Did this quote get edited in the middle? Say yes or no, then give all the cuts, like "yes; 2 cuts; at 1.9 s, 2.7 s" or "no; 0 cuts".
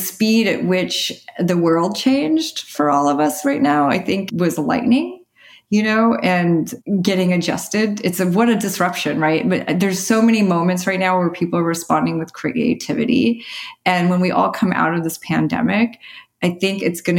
yes; 3 cuts; at 2.6 s, 4.2 s, 6.8 s